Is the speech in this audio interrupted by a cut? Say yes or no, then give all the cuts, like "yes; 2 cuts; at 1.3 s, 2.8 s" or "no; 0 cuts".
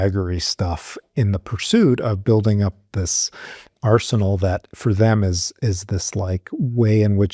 no; 0 cuts